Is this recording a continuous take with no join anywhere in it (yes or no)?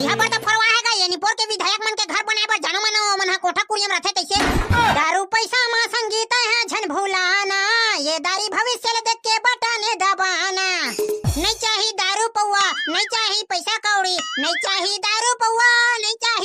no